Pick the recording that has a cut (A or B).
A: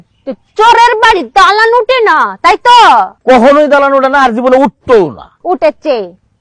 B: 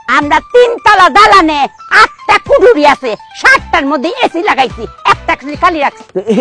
A